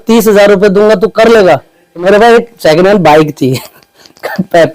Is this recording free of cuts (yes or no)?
no